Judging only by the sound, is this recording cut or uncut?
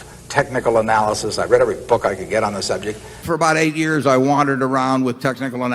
cut